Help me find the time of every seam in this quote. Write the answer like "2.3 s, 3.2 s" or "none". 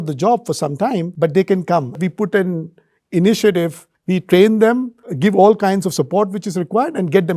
1.1 s, 2.0 s, 4.0 s